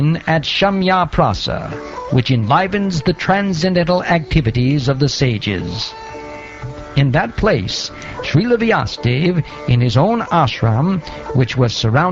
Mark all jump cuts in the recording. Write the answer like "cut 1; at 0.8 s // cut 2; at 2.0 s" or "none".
cut 1; at 2.2 s